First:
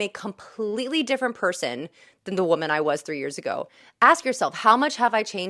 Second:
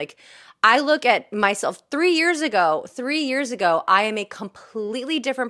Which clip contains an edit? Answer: first; 1 cut; at 3.8 s

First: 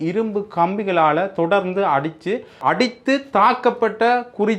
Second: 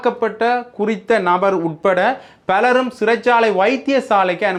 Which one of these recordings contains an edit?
first; 1 cut; at 2.6 s

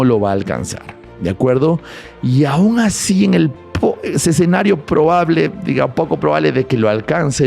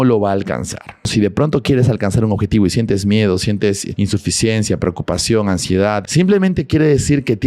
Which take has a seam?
second; 3 cuts; at 1.1 s, 3.9 s, 6.0 s

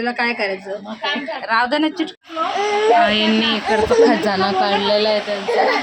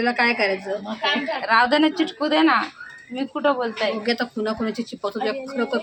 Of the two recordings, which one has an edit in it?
first; 1 cut; at 2.2 s

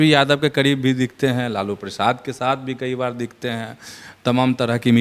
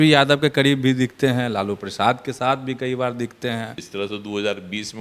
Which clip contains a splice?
second; 1 cut; at 3.8 s

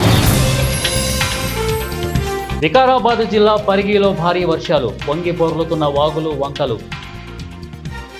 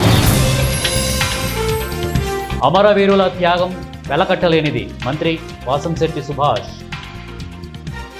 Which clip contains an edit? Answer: first; 2 cuts; at 2.5 s, 7.1 s

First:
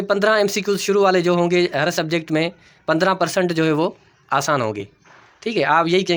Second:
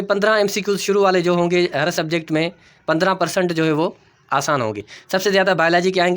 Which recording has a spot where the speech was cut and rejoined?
second; 1 cut; at 4.9 s

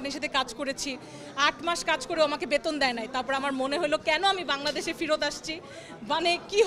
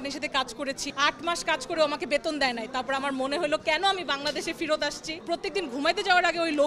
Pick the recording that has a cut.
second; 2 cuts; at 0.9 s, 5.2 s

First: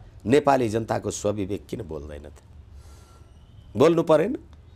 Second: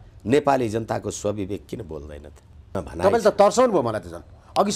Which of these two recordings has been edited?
second; 1 cut; at 2.8 s

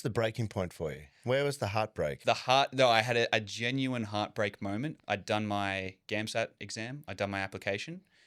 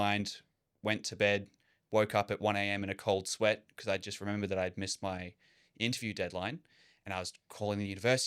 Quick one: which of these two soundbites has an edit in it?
first; 3 cuts; at 1.1 s, 2.2 s, 5.0 s

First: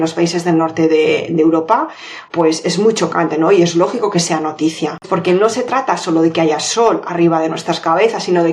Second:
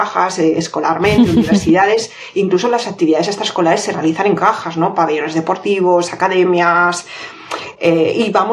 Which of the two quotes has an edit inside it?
first; 1 cut; at 5.0 s

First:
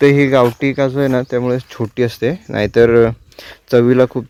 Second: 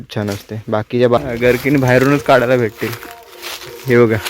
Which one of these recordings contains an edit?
second; 1 cut; at 1.2 s

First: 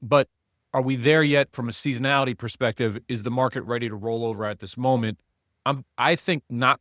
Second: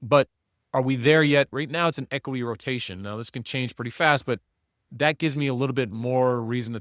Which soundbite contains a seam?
second; 1 cut; at 1.5 s

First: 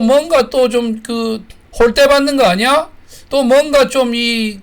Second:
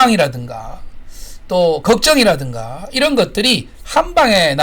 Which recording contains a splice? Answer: first; 1 cut; at 1.6 s

